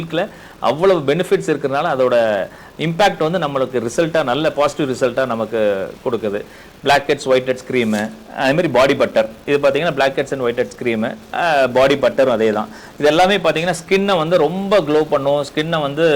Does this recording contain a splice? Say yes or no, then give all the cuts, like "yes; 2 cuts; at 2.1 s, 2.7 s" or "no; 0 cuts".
no; 0 cuts